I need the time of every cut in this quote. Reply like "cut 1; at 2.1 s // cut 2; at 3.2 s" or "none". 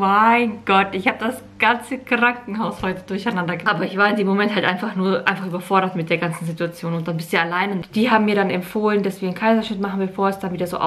cut 1; at 3.6 s // cut 2; at 7.8 s